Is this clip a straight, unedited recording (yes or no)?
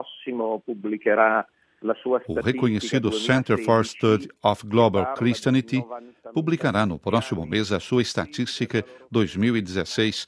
no